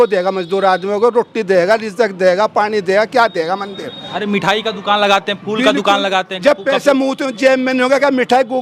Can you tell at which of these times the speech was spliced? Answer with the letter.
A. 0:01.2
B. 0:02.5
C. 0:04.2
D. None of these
C